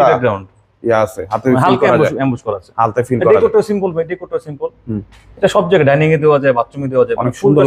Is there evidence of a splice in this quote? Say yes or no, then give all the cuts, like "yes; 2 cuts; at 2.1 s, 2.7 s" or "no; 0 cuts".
no; 0 cuts